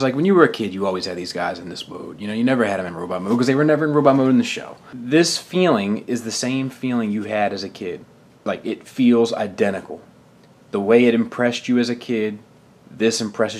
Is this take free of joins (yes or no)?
no